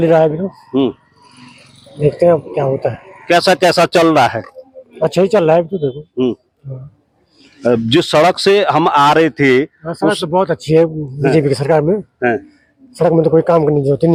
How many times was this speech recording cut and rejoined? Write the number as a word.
zero